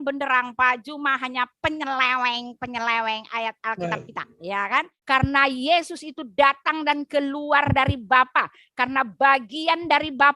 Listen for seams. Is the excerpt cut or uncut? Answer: cut